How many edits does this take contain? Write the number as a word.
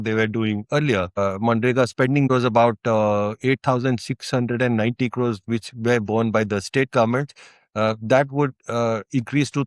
two